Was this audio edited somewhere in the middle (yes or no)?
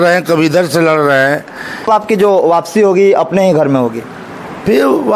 yes